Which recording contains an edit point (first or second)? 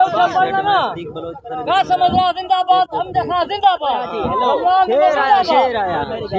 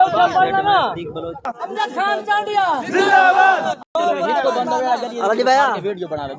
second